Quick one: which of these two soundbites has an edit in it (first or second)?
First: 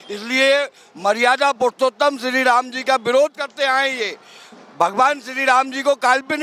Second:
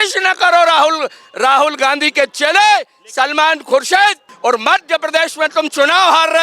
second